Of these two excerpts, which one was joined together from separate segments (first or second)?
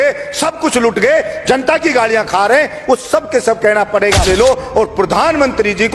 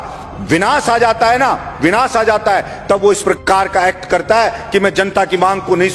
first